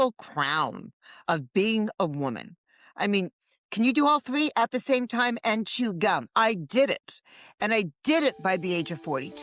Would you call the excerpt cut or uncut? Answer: uncut